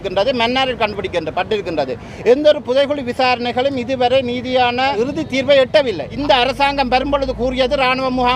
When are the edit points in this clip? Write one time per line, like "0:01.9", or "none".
0:01.3
0:04.9
0:06.1